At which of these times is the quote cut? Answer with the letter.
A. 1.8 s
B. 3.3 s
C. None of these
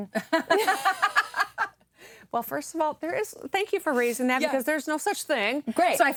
C